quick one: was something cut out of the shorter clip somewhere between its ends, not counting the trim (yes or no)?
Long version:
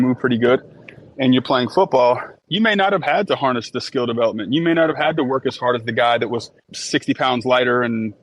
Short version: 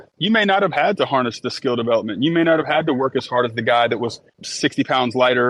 no